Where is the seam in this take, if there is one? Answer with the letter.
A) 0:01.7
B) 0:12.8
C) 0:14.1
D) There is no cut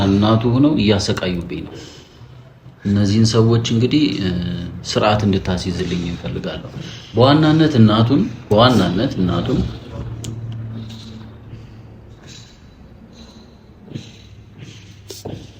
D